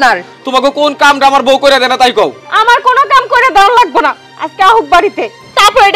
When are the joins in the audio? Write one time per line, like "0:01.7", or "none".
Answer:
0:02.5